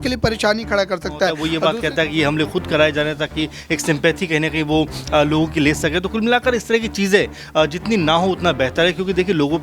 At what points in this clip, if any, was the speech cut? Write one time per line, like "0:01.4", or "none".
0:01.4